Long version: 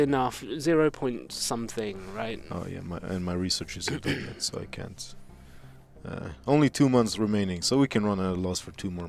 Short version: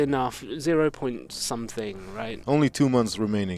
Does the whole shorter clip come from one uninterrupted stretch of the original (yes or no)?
no